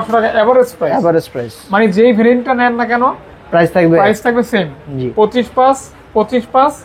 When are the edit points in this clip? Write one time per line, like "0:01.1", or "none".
none